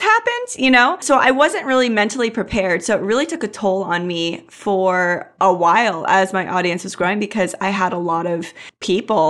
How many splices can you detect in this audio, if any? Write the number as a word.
one